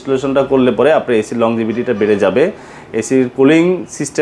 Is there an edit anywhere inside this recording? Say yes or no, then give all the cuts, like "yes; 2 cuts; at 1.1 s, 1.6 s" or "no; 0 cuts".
no; 0 cuts